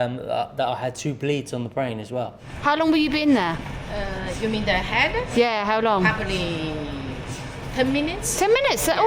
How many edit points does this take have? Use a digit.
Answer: 1